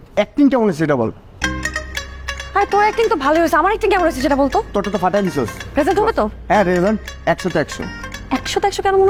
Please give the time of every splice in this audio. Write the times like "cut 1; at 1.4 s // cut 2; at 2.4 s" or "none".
none